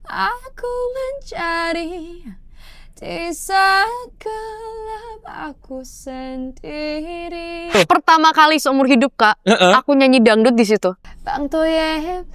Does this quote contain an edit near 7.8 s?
yes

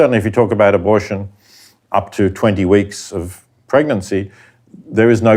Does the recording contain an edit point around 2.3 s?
no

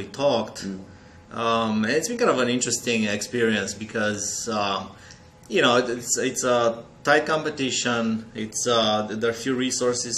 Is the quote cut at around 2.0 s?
no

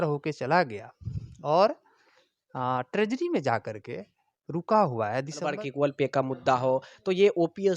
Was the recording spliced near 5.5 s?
yes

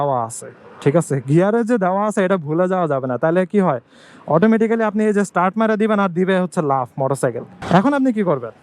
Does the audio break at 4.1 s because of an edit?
no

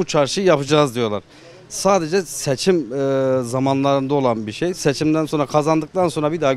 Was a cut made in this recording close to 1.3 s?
no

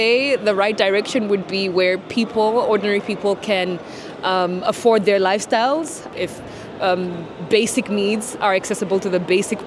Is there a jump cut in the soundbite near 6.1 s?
yes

